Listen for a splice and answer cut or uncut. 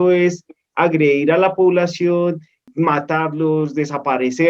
cut